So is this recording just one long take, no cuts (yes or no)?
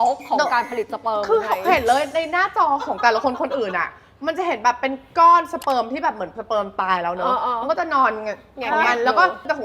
yes